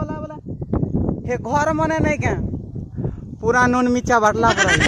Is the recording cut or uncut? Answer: uncut